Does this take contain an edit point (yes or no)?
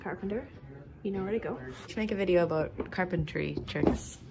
no